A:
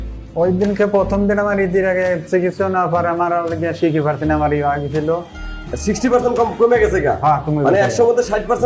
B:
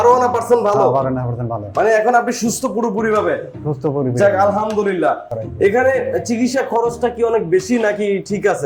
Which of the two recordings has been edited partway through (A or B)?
B